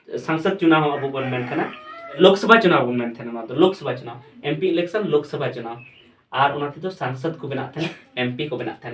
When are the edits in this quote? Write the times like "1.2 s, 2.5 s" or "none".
2.2 s